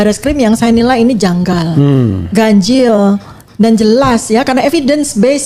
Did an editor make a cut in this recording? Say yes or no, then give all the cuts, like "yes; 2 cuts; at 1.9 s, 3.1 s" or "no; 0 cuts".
no; 0 cuts